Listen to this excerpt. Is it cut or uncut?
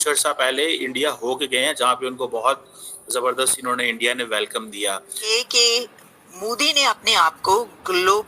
cut